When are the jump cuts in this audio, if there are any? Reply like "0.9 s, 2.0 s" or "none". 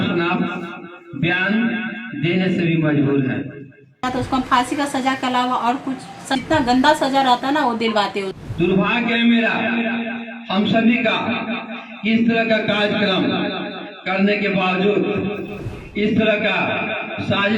4.0 s, 6.4 s, 8.4 s